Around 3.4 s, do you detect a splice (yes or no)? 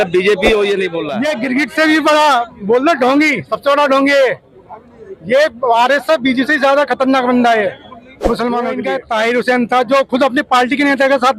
no